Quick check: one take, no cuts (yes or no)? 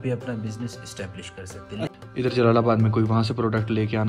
no